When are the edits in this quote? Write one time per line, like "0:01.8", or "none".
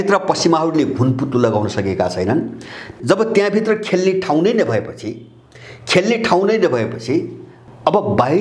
0:02.9
0:07.5

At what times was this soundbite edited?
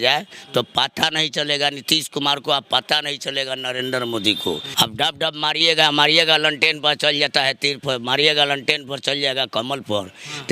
0:04.7

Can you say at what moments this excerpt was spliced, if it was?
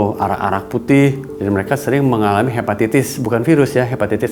0:01.3

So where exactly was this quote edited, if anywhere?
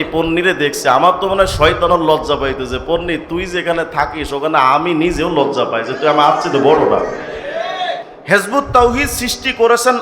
0:08.1

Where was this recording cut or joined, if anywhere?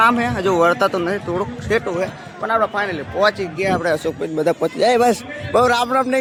none

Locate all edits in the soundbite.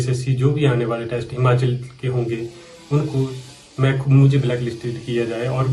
none

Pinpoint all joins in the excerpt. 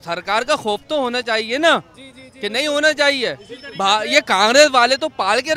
none

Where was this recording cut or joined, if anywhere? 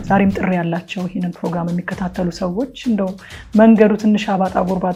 none

